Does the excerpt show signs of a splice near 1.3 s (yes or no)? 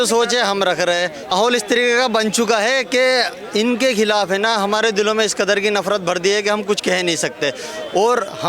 yes